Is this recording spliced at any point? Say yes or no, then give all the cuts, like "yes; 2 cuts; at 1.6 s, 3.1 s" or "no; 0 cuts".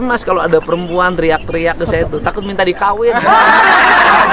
no; 0 cuts